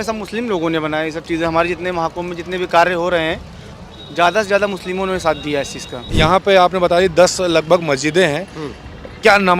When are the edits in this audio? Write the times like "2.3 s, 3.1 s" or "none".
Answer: 6.0 s